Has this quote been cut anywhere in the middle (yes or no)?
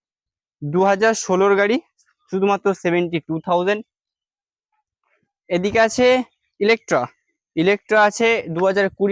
no